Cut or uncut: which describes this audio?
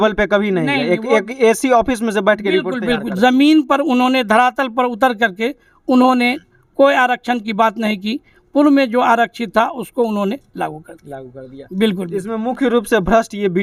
uncut